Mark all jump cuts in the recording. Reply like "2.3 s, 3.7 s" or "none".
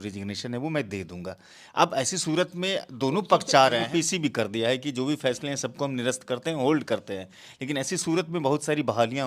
3.9 s